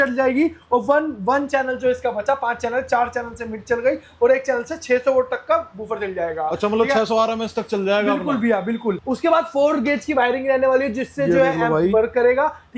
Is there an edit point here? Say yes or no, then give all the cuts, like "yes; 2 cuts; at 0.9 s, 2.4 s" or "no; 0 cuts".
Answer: yes; 1 cut; at 9.0 s